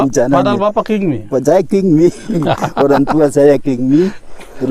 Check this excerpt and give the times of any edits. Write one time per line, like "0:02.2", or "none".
none